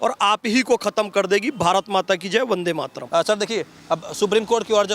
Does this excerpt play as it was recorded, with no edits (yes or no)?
yes